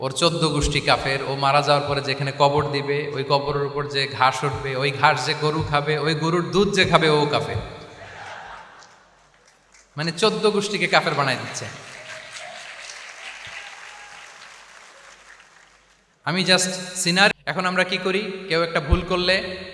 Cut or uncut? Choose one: cut